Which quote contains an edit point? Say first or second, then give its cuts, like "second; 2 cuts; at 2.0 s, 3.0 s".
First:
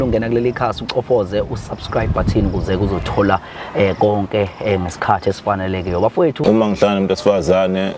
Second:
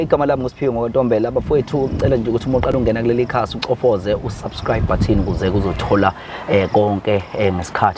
first; 1 cut; at 6.4 s